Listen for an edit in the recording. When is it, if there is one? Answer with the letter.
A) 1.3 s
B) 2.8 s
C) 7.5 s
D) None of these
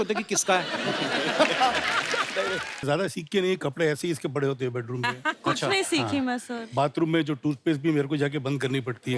B